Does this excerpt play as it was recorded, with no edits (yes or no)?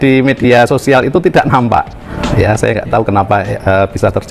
no